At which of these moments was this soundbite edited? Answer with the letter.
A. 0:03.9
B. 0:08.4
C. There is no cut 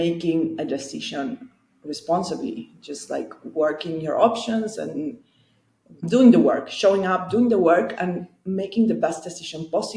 C